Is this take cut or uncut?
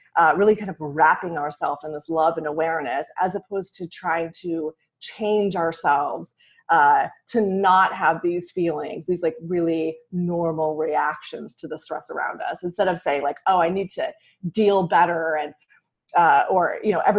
uncut